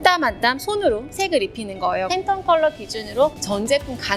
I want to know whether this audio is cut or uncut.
cut